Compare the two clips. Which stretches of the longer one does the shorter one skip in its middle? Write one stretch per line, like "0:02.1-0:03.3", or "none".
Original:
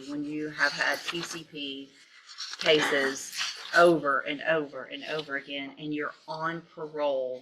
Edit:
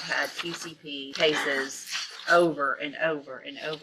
0:01.8-0:02.6